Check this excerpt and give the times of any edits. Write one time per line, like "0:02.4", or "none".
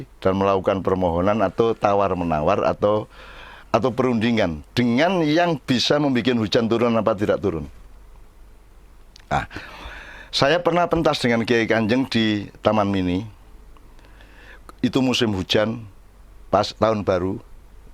none